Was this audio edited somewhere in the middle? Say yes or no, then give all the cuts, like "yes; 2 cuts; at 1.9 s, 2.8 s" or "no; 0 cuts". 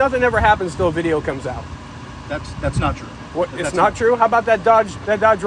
no; 0 cuts